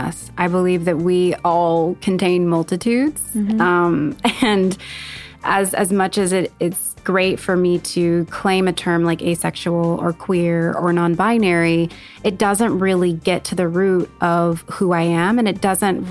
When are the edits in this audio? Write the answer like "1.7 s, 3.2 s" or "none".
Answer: none